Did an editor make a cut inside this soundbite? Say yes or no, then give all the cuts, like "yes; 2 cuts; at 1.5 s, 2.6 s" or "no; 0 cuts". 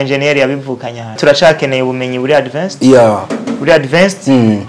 yes; 1 cut; at 1.2 s